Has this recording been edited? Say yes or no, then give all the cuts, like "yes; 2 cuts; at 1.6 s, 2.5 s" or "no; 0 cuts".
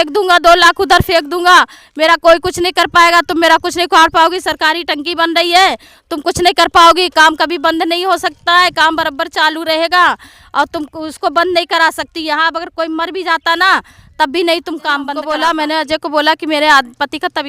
yes; 1 cut; at 15.1 s